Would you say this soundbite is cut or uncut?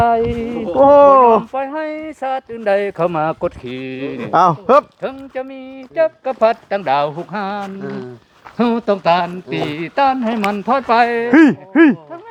uncut